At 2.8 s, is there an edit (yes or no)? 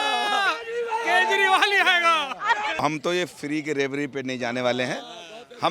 yes